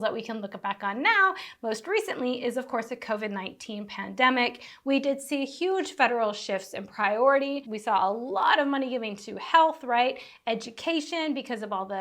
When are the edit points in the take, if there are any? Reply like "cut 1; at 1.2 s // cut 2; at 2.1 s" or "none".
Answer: none